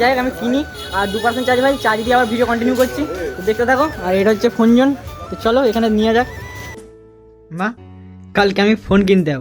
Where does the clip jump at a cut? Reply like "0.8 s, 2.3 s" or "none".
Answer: 6.8 s